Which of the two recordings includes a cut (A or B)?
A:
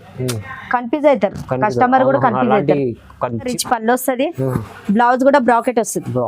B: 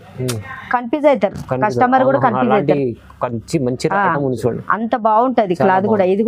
A